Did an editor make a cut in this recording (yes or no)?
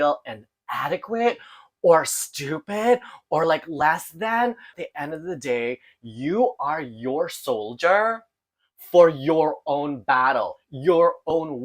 yes